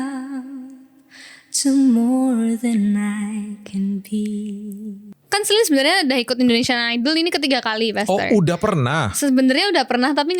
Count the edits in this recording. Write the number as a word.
one